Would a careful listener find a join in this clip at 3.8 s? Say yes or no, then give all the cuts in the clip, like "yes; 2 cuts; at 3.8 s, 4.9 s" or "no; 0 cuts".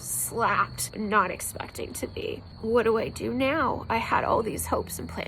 no; 2 cuts; at 0.9 s, 2.5 s